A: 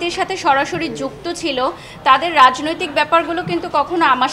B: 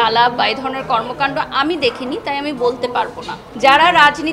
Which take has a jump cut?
B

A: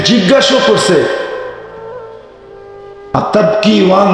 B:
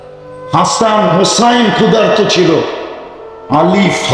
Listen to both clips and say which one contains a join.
A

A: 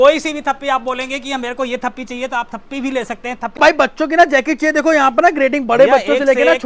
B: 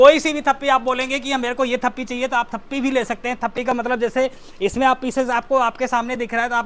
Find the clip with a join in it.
A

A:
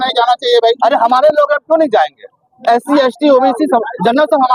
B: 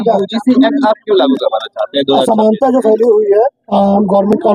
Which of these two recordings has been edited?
B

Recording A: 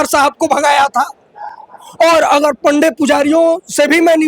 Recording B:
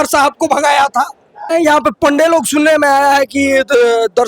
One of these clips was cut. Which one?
B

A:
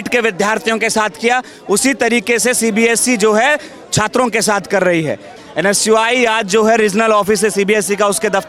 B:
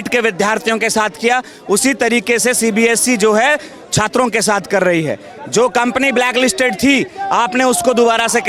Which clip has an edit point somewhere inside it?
A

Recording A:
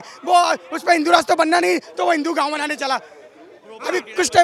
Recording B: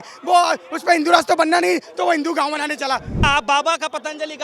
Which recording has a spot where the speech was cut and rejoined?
B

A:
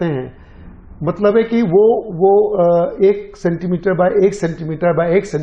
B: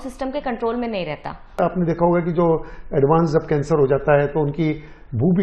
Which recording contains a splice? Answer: B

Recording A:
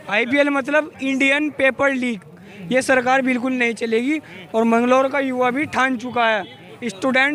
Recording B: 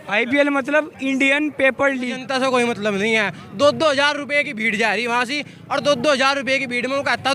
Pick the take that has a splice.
B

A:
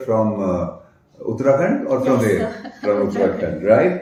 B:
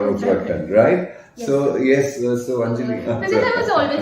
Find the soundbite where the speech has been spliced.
B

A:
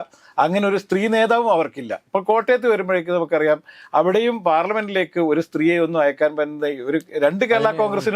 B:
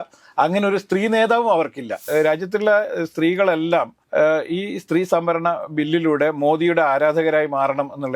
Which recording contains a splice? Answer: B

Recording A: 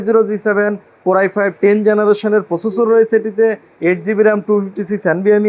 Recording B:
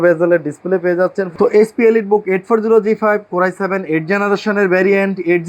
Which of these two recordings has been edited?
B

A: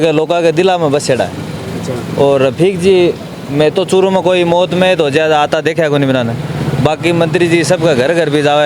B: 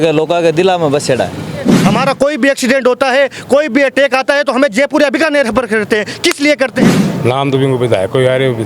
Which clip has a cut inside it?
B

